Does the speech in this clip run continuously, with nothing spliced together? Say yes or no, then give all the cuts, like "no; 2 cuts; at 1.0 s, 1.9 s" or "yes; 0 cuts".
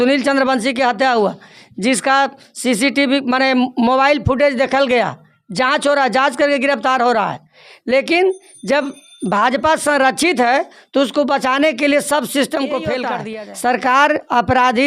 no; 1 cut; at 13.1 s